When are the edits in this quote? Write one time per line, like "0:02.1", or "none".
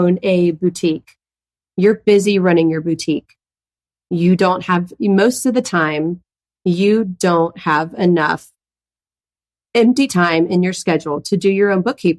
none